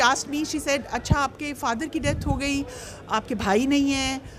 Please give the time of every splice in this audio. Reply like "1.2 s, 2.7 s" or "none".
none

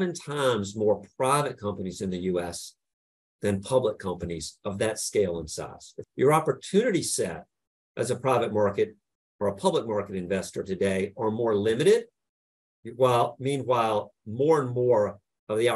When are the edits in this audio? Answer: 6.0 s

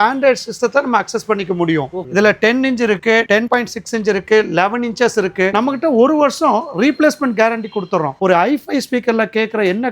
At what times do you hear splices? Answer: 2.1 s, 5.5 s, 8.1 s

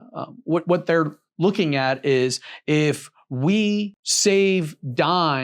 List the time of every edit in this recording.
4.0 s

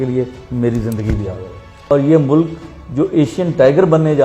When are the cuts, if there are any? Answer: 1.9 s

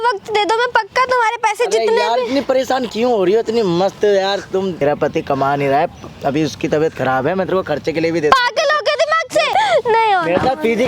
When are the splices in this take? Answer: 4.8 s, 9.5 s

